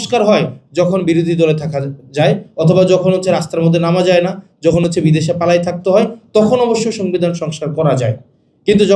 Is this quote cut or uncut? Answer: uncut